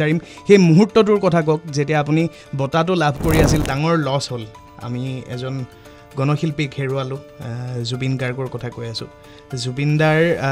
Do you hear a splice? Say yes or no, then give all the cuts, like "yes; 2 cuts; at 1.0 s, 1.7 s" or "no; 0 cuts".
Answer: yes; 1 cut; at 3.6 s